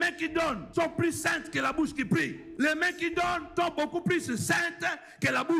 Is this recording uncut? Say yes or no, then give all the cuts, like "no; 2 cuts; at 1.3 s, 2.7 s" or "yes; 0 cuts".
yes; 0 cuts